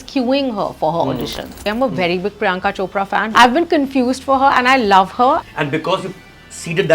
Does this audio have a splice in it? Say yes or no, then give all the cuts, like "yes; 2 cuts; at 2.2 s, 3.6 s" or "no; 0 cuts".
yes; 3 cuts; at 1.6 s, 3.3 s, 5.4 s